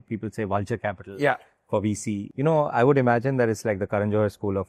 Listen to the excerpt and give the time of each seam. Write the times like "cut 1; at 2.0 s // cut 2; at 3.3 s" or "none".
cut 1; at 2.3 s